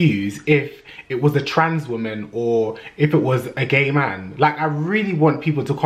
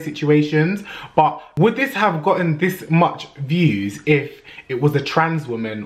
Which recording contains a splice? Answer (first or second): second